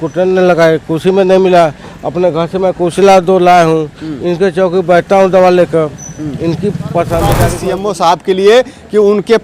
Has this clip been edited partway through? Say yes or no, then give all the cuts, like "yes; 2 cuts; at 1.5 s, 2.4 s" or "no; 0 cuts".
yes; 1 cut; at 7.5 s